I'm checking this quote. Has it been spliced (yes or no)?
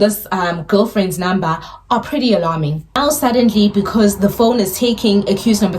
yes